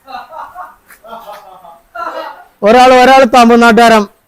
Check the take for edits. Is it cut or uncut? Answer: uncut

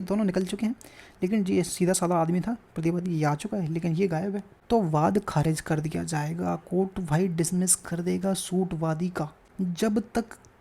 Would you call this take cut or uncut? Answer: cut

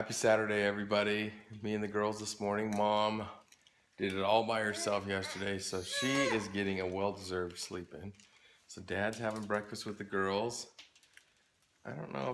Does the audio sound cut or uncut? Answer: uncut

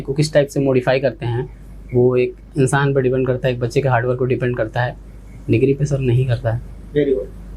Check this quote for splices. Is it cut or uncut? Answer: uncut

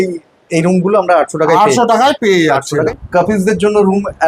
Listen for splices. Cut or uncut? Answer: cut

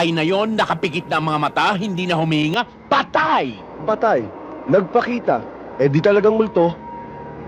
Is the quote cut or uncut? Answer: cut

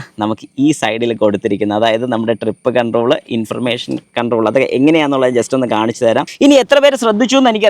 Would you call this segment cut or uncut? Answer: cut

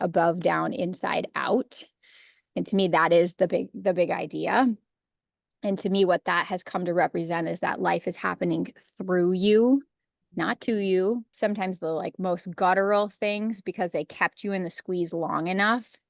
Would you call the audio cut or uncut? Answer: cut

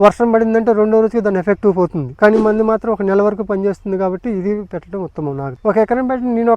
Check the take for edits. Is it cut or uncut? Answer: cut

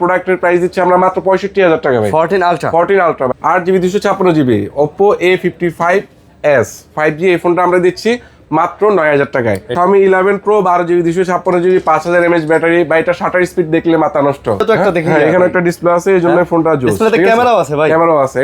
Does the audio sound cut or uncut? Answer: cut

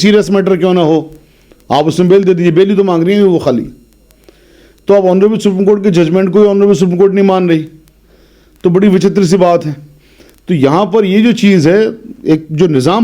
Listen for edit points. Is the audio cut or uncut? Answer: uncut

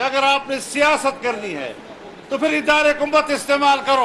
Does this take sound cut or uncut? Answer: uncut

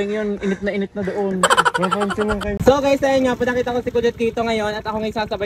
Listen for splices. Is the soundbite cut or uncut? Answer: cut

